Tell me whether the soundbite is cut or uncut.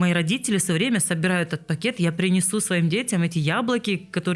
uncut